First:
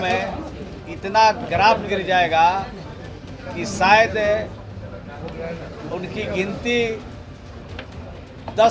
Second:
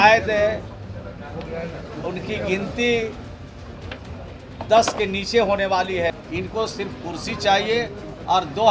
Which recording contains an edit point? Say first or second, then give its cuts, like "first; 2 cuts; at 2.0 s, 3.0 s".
second; 1 cut; at 6.1 s